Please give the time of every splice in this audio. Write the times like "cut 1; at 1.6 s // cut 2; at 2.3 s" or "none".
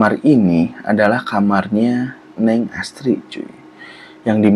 none